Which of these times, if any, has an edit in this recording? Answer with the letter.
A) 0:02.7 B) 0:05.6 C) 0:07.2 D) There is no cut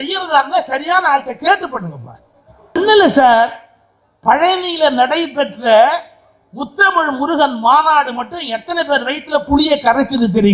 A